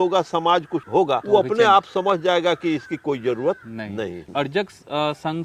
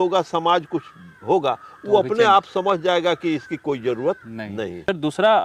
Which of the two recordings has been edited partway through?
first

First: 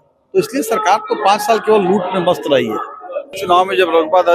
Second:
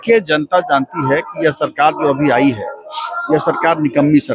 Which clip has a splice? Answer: first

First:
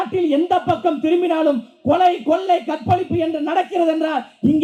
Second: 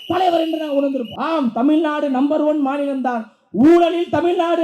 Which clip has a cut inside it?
second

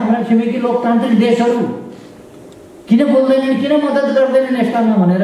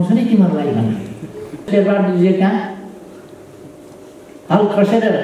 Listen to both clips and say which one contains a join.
second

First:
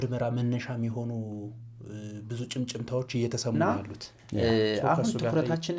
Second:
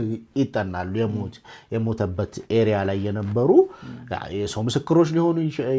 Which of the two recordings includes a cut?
first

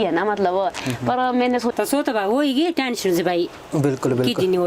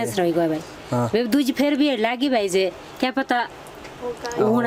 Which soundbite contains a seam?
first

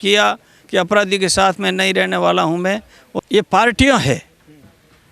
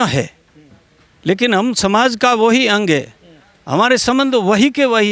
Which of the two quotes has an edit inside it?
first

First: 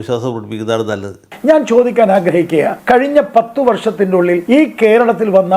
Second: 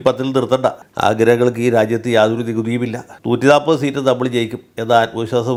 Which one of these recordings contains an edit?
first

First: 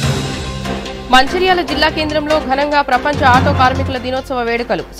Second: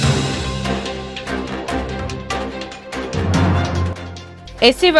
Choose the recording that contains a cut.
first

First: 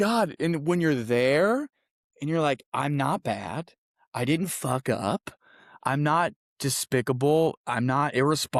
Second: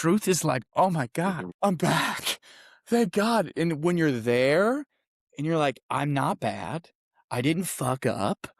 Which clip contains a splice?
second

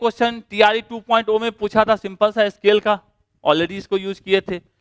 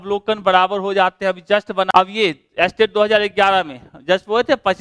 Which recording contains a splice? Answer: second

